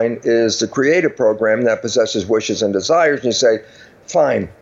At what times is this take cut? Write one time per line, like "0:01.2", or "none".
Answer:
none